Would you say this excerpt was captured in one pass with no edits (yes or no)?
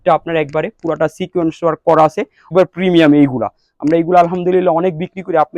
no